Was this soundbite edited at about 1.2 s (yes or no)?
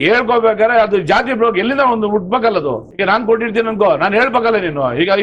no